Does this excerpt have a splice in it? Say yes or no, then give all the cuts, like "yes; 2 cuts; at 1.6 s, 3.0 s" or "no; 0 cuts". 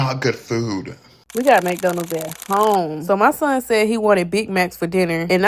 yes; 1 cut; at 1.3 s